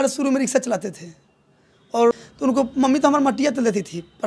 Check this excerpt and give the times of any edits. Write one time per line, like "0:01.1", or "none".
0:02.1